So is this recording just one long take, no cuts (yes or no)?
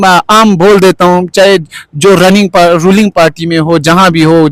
yes